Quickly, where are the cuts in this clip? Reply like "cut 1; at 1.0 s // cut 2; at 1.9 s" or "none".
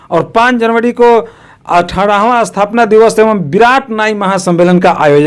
none